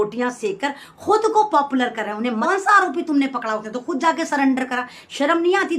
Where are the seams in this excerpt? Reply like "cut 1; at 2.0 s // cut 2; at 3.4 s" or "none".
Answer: cut 1; at 2.4 s